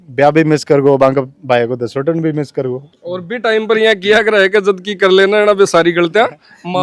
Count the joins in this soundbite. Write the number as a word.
one